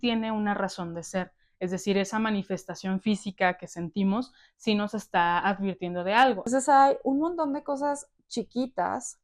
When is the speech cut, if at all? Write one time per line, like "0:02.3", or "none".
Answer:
0:06.5